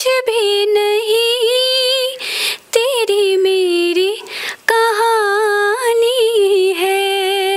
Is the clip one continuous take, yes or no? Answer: yes